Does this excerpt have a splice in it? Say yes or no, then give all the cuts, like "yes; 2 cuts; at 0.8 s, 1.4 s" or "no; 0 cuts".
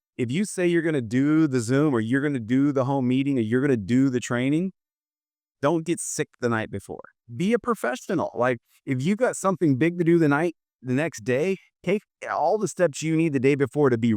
yes; 1 cut; at 7.2 s